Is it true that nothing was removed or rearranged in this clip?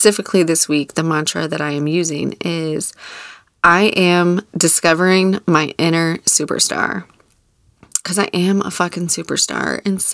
no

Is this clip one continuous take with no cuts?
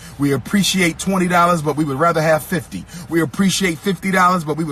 yes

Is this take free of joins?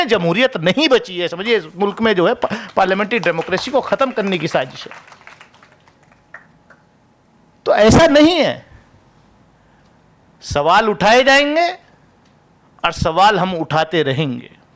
yes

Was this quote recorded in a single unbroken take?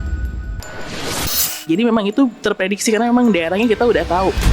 no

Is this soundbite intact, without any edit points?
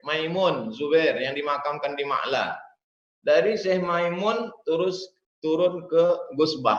yes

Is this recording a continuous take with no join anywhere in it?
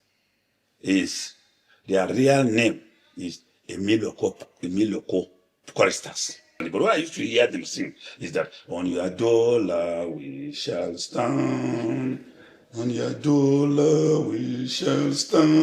no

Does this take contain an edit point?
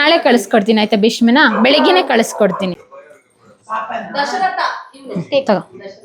yes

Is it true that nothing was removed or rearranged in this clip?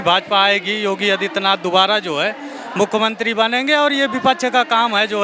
yes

